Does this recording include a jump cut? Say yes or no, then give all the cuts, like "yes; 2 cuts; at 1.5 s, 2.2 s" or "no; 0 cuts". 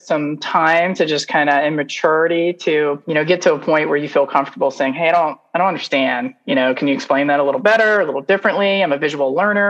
yes; 1 cut; at 3.0 s